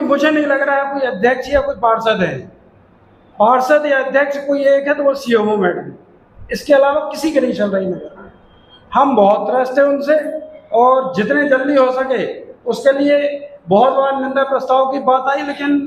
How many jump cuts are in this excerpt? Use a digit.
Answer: 0